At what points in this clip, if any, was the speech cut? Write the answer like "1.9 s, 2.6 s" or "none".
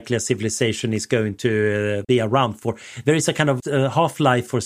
2.0 s, 3.6 s